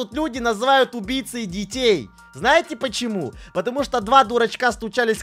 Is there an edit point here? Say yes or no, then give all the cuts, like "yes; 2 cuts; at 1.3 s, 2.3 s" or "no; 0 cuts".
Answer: no; 0 cuts